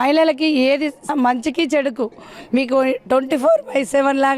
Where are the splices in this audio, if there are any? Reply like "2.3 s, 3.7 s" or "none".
1.1 s